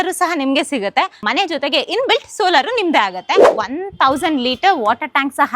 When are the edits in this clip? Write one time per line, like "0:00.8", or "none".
0:01.2
0:03.6